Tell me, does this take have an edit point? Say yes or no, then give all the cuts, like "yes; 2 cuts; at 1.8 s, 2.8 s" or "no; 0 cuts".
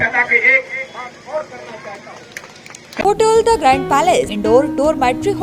yes; 2 cuts; at 3.0 s, 4.4 s